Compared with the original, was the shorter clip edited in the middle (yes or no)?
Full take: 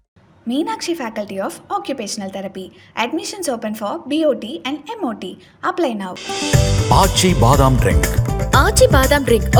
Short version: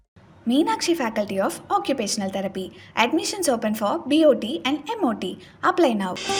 no